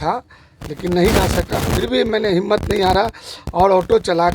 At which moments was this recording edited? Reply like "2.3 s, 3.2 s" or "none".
none